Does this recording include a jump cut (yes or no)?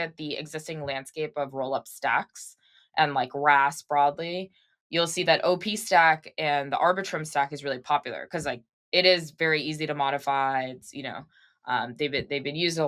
no